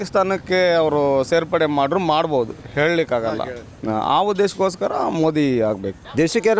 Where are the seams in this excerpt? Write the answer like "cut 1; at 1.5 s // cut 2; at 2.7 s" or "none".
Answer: none